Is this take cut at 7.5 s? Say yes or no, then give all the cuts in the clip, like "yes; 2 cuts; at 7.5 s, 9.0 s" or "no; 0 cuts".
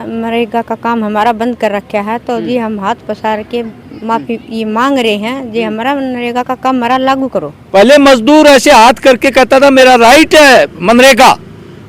yes; 1 cut; at 7.5 s